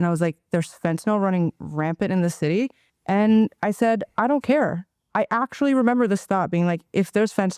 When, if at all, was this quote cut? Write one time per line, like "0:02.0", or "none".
0:02.9